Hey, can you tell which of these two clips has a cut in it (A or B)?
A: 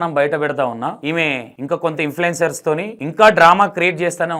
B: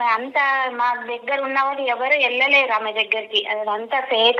A